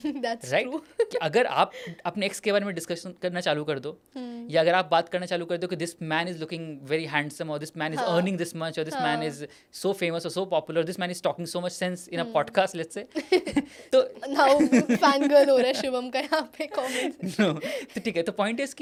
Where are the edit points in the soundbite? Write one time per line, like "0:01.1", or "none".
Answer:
none